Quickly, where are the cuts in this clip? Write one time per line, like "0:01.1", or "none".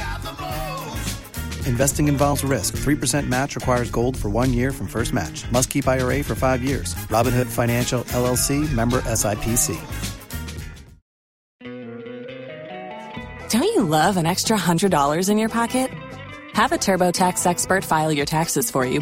0:11.7

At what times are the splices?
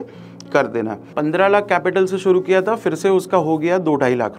0:01.0

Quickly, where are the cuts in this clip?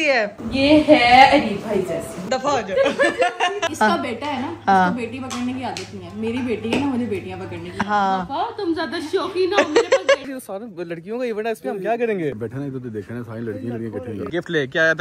0:02.2
0:03.7
0:10.2
0:12.4
0:14.3

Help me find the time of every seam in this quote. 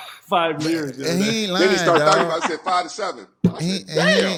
none

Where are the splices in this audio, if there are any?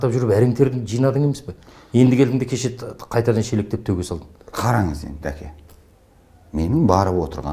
none

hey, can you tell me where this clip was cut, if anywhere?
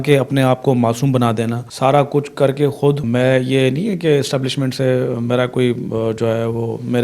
0:01.6
0:03.0

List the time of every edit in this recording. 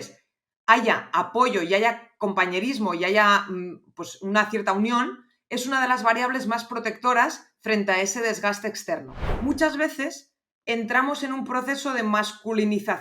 0:09.2

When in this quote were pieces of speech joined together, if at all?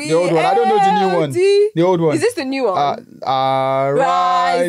none

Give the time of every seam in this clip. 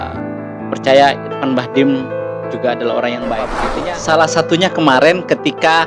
0:03.7

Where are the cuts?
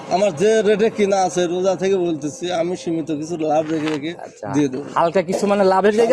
none

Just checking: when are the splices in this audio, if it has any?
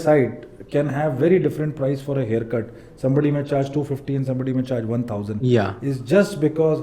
none

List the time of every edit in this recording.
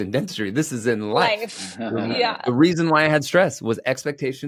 none

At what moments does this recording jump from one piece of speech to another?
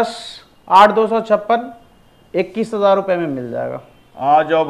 none

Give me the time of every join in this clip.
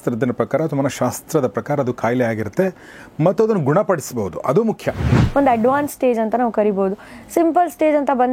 0:05.1

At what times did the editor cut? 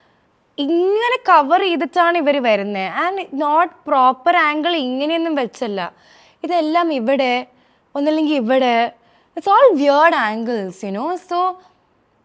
none

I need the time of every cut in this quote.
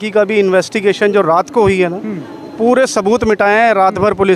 none

